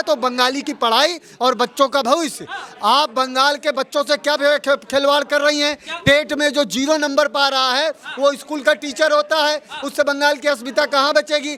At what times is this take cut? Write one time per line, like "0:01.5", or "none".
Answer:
none